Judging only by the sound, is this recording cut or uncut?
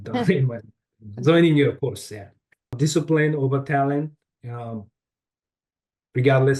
cut